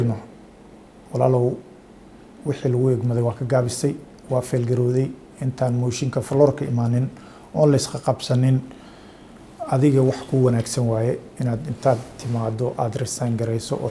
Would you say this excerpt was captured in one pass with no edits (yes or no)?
yes